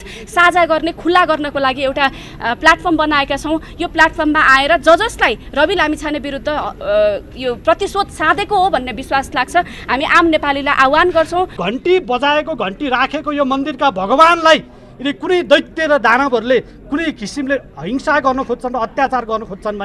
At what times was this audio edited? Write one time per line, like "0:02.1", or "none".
0:11.6